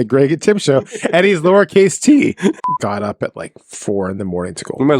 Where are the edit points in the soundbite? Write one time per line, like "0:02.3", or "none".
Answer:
0:02.6